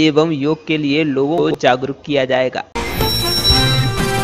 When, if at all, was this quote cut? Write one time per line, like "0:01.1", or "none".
0:01.4
0:02.7